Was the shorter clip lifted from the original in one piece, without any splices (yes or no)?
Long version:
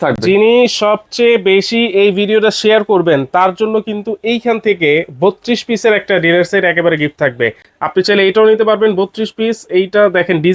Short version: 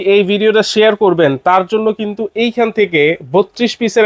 yes